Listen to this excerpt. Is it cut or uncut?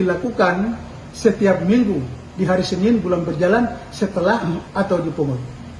cut